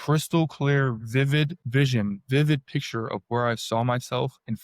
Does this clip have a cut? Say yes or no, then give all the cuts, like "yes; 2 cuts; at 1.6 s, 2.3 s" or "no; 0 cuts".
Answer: yes; 1 cut; at 1.6 s